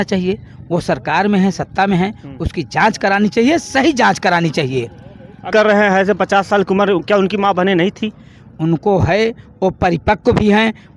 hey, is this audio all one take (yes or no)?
no